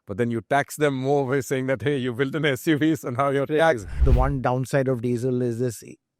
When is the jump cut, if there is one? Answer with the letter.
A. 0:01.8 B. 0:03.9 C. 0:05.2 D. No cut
B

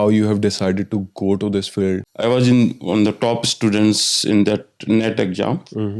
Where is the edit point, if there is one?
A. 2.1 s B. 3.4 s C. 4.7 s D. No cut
A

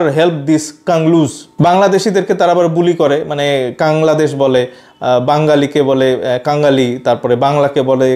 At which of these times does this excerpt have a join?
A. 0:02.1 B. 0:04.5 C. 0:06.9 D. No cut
D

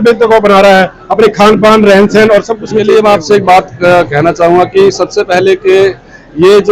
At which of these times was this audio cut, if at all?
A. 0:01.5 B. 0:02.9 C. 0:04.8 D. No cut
B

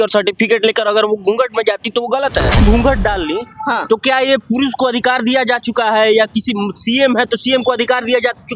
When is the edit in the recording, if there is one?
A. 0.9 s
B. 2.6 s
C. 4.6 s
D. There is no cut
B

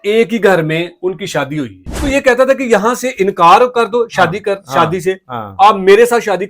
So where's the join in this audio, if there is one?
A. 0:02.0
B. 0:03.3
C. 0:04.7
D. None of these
A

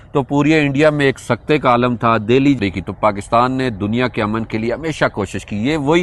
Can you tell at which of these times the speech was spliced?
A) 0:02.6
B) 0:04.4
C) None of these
A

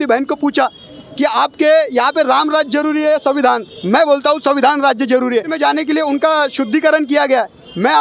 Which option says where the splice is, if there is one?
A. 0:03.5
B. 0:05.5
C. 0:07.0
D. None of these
B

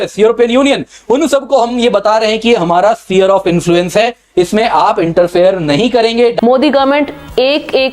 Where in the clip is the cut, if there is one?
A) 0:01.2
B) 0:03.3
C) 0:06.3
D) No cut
C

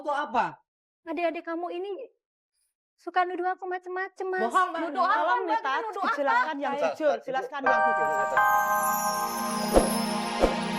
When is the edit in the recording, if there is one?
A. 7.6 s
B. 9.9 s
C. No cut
A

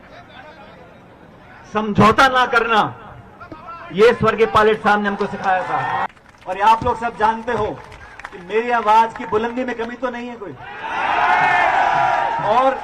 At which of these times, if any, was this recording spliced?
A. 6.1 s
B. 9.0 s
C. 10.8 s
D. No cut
A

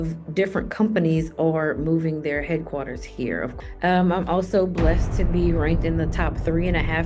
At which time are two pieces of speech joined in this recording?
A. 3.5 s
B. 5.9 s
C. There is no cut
A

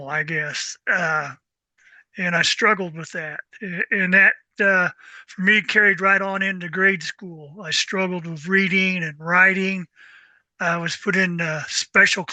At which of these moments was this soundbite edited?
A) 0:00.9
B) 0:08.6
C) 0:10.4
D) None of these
D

